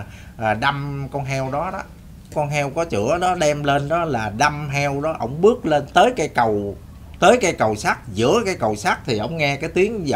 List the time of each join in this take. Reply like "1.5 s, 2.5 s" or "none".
2.3 s